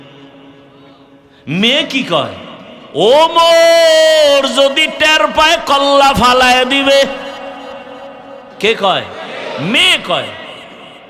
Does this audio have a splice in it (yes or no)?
yes